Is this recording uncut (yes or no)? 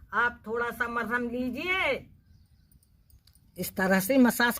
no